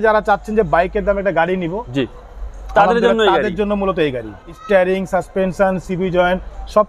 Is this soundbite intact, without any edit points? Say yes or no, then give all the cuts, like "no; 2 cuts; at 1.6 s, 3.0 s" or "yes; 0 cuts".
no; 1 cut; at 4.5 s